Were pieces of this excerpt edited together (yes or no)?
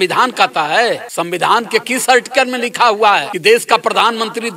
yes